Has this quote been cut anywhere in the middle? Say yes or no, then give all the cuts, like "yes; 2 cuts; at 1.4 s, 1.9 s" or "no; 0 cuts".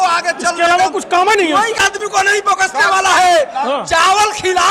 yes; 1 cut; at 1.8 s